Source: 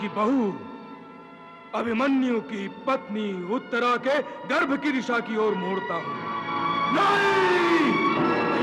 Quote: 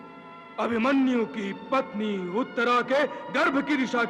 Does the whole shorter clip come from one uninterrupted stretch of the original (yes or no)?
yes